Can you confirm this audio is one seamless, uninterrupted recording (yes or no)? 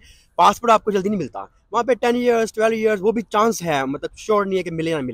yes